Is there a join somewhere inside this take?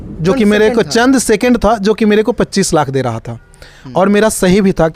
no; 0 cuts

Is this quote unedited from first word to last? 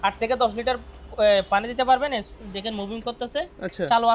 yes; 0 cuts

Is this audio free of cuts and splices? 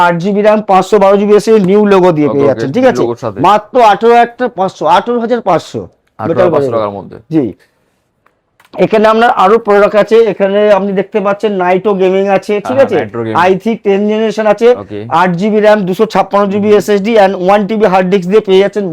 yes; 0 cuts

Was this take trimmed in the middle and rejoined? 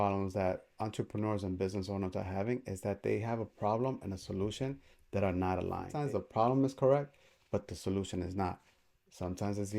yes; 1 cut; at 5.9 s

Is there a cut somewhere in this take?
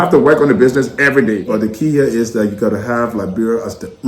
yes; 1 cut; at 1.4 s

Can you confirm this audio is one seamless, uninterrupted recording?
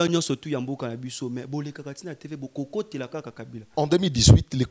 no; 1 cut; at 3.5 s

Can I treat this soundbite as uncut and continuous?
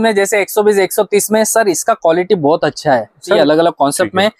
no; 1 cut; at 3.4 s

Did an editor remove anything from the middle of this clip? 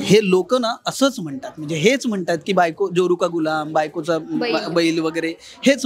no; 0 cuts

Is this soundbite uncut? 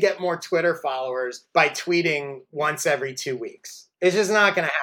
yes; 0 cuts

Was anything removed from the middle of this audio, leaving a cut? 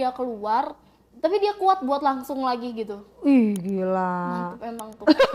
no; 0 cuts

